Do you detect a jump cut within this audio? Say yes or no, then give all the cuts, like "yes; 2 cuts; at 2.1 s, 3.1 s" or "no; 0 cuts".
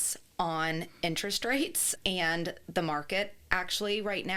no; 0 cuts